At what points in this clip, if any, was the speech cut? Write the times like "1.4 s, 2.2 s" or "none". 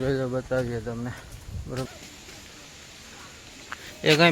1.9 s